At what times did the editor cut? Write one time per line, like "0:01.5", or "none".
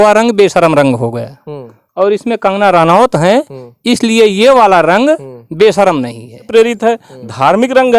0:06.5